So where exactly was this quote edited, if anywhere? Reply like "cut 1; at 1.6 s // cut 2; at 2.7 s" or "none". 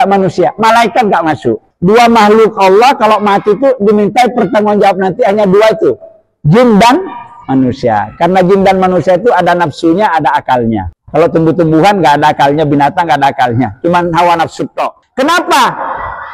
cut 1; at 1.7 s // cut 2; at 11.0 s // cut 3; at 15.0 s